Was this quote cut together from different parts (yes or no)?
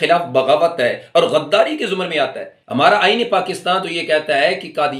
no